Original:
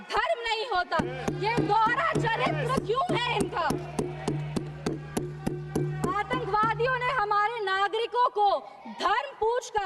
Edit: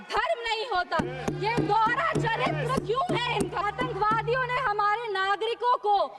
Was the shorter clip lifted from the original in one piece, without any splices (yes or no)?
no